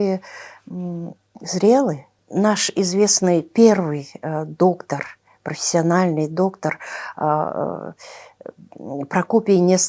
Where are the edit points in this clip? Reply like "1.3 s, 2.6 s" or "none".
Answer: 2.2 s